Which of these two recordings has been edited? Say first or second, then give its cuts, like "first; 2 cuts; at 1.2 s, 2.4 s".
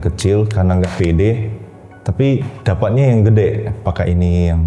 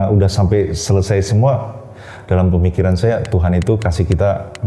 first; 2 cuts; at 2.5 s, 3.8 s